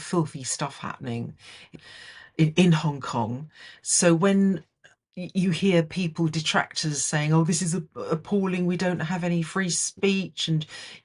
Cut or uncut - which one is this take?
cut